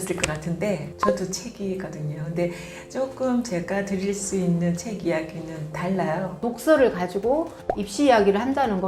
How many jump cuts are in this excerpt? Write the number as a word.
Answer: one